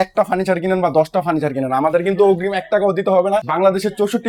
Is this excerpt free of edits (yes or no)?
yes